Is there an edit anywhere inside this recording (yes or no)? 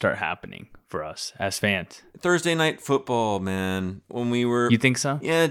no